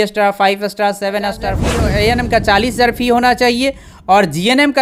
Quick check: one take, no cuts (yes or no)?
no